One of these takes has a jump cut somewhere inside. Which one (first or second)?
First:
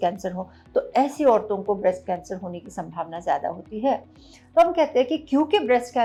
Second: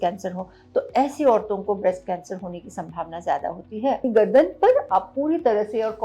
second